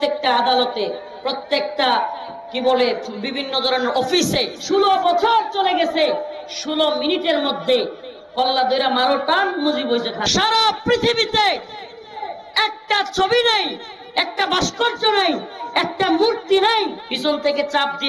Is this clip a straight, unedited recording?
no; 3 cuts; at 4.6 s, 10.2 s, 17.1 s

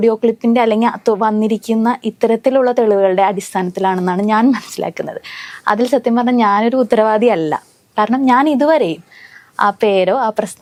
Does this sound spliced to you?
no; 0 cuts

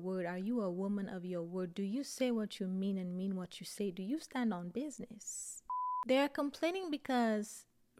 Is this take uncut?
no; 1 cut; at 6.0 s

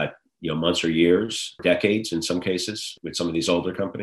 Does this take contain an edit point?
yes; 2 cuts; at 1.6 s, 3.0 s

